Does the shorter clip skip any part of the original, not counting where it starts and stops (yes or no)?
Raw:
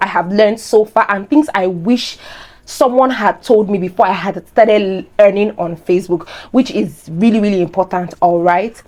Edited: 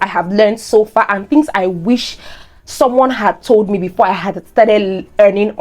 no